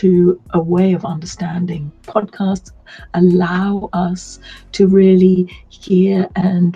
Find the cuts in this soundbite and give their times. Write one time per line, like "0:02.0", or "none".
0:02.1